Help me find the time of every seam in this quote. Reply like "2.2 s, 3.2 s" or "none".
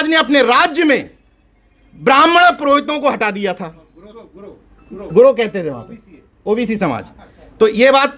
none